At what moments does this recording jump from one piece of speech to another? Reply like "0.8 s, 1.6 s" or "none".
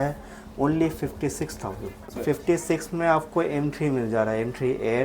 2.1 s